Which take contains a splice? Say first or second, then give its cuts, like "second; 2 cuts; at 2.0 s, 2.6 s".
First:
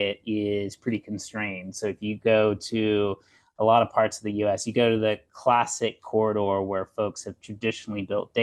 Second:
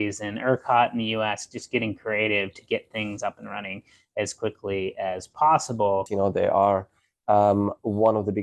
second; 1 cut; at 6.1 s